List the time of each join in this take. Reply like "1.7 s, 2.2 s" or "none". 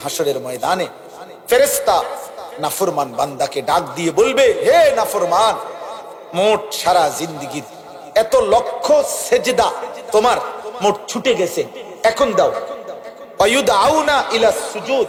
none